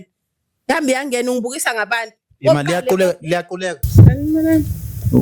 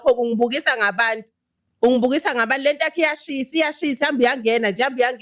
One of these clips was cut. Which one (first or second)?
first